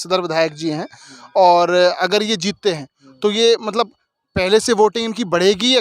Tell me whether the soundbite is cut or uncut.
uncut